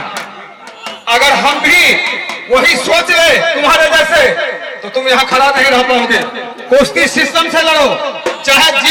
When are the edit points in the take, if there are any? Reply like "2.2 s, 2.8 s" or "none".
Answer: none